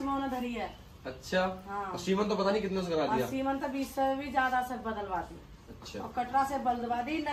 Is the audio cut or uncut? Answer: uncut